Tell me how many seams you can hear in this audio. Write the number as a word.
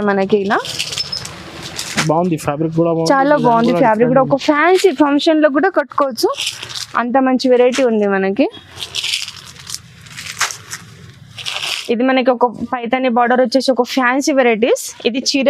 one